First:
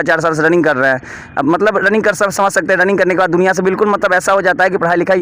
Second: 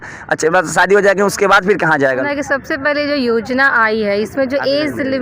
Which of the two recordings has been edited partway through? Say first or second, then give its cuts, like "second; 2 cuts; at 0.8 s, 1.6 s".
second; 1 cut; at 2.2 s